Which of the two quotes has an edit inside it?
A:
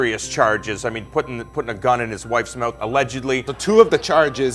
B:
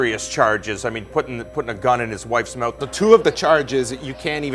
B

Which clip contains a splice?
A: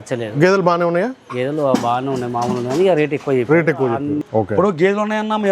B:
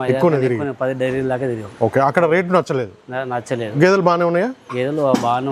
A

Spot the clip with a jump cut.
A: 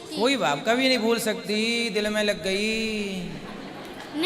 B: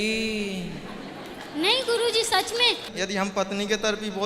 B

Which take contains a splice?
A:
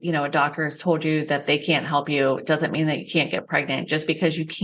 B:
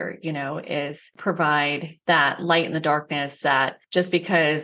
B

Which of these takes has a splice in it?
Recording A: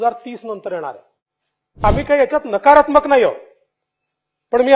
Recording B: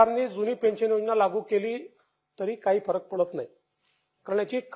A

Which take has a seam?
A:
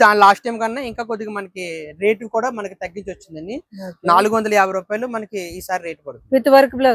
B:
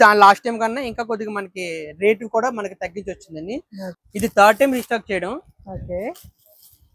B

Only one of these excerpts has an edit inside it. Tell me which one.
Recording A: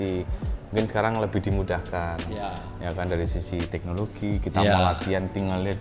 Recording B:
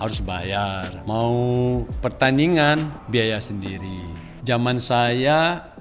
B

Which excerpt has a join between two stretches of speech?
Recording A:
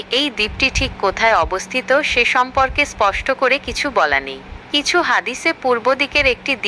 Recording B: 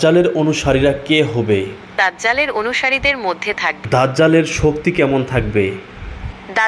B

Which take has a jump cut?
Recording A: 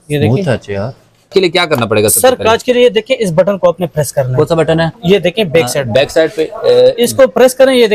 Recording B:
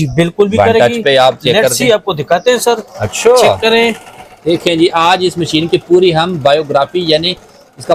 A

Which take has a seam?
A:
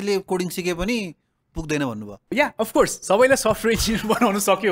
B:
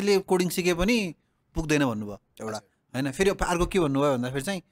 A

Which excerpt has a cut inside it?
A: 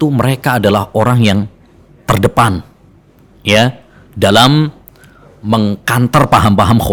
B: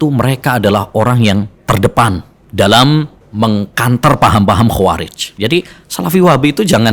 B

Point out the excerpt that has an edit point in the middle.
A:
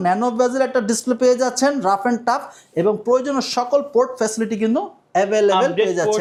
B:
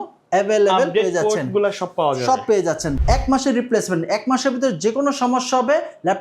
B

